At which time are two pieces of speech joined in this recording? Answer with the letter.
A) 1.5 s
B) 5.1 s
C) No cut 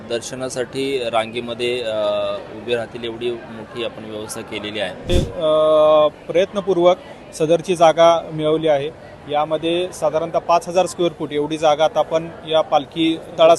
B